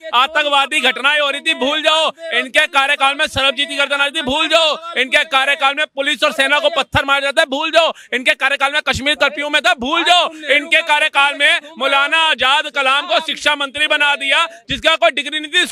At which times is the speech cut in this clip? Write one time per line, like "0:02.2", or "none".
none